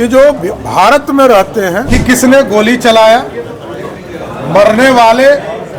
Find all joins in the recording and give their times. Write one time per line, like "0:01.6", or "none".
0:01.8